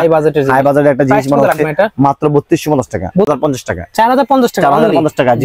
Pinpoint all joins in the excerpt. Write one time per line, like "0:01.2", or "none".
0:03.3